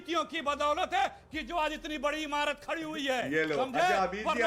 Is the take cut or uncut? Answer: uncut